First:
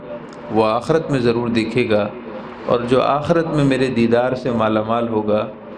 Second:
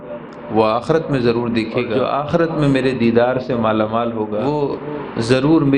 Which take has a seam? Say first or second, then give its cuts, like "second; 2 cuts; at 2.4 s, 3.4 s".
second; 2 cuts; at 1.9 s, 4.4 s